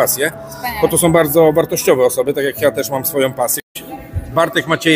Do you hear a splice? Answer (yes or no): yes